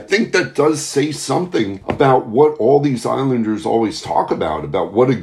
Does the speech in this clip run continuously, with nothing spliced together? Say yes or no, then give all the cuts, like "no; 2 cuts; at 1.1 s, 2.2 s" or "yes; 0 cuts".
yes; 0 cuts